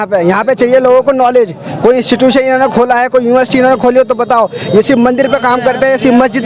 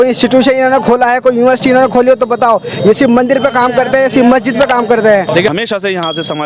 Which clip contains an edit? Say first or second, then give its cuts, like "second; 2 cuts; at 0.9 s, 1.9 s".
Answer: second; 1 cut; at 5.5 s